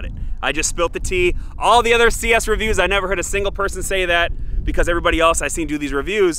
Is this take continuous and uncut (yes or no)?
yes